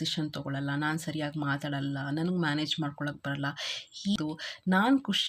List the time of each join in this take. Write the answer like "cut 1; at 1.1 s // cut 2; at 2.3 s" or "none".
cut 1; at 4.2 s